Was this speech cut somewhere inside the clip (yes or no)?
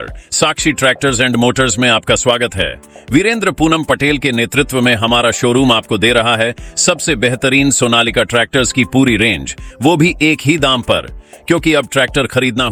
no